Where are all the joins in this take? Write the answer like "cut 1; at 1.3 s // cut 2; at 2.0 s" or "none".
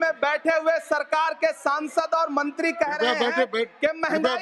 none